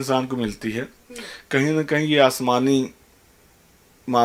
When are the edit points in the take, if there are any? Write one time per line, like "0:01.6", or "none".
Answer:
none